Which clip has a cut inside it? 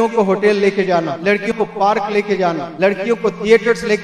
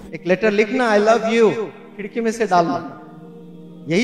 first; 2 cuts; at 1.5 s, 2.7 s

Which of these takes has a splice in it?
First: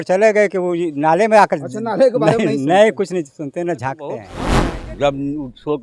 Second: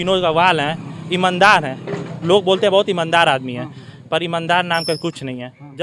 first; 1 cut; at 4.4 s

